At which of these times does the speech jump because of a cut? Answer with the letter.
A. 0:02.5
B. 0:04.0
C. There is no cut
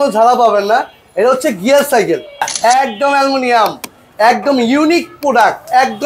A